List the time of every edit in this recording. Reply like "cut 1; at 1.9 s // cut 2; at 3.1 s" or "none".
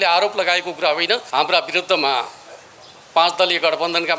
cut 1; at 1.2 s